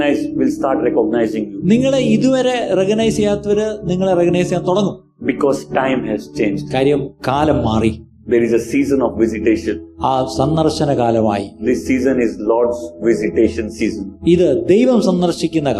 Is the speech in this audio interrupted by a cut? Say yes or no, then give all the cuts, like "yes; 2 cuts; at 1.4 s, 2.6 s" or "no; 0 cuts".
no; 0 cuts